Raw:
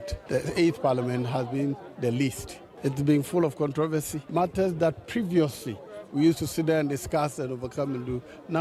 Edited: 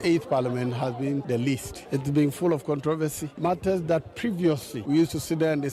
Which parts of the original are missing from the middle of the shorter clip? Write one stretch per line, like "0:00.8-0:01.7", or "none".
0:02.0-0:02.3
0:05.6-0:06.0